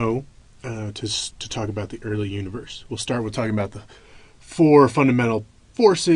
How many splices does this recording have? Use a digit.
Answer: 0